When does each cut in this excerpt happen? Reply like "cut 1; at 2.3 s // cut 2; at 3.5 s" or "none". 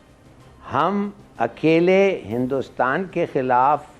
none